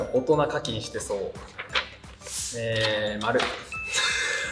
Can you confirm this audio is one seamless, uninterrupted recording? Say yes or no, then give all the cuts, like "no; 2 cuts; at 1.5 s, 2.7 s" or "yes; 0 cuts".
yes; 0 cuts